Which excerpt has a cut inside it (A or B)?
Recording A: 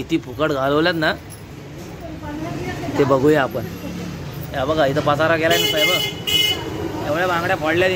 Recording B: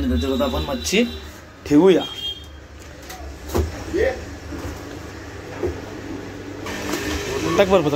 B